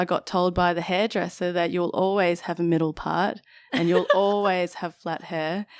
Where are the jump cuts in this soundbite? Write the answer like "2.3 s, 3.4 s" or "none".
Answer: none

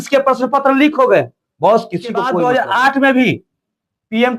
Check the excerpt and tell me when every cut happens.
2.3 s

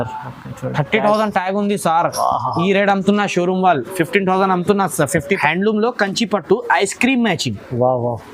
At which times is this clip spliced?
5.4 s

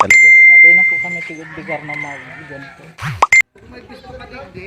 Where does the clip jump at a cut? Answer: 3.5 s

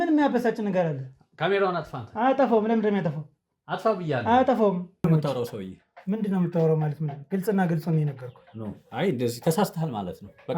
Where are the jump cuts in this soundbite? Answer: 5.0 s

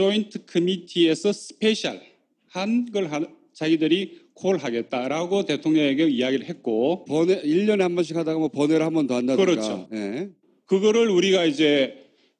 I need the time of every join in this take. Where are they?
none

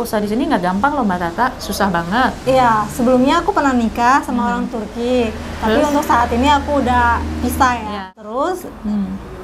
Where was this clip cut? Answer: 7.9 s

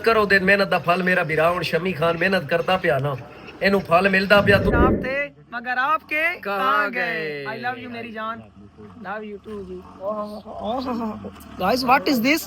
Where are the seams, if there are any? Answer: 4.7 s

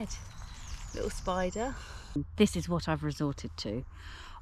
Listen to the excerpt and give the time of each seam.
2.2 s

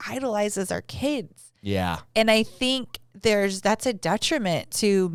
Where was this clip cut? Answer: none

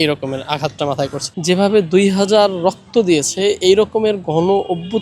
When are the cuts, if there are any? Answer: 1.2 s

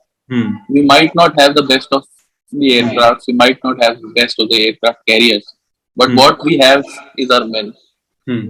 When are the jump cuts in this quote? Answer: none

